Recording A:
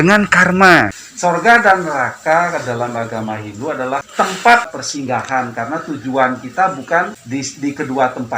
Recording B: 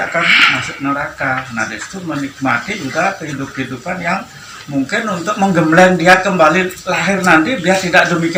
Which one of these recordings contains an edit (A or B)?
A